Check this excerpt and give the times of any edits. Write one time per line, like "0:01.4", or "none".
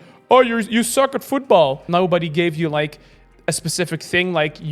0:01.8